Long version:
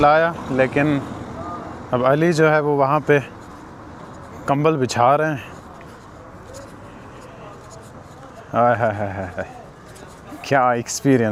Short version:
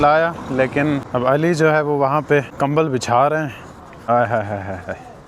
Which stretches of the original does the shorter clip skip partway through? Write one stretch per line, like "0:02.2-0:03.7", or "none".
0:01.0-0:01.8
0:03.3-0:04.4
0:06.0-0:08.6